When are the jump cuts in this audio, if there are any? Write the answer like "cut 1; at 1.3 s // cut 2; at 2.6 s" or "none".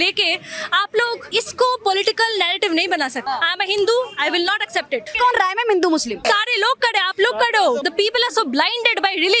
cut 1; at 1.2 s // cut 2; at 3.2 s // cut 3; at 5.1 s // cut 4; at 6.2 s // cut 5; at 7.8 s